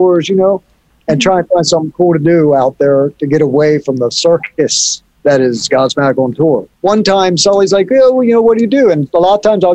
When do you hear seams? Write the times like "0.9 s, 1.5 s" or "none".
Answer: 6.7 s